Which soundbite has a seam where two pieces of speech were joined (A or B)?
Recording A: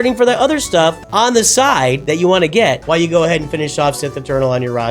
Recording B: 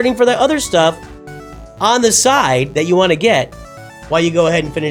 A